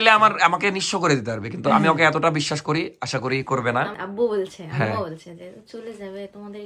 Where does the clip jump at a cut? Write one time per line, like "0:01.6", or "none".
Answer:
0:04.0

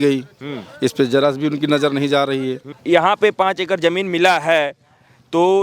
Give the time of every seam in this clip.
0:02.7

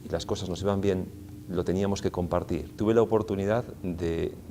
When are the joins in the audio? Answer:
0:02.8

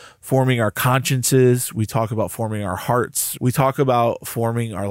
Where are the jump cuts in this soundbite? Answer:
0:03.2

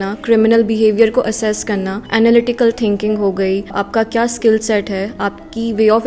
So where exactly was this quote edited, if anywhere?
0:02.0
0:03.8

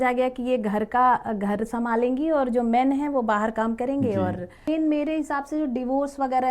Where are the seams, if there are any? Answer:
0:04.7

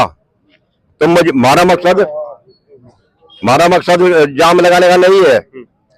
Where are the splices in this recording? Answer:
none

